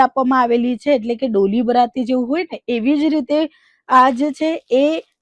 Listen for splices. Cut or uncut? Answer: uncut